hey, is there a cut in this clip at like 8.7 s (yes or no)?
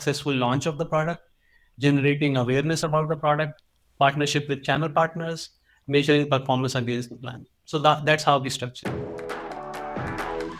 yes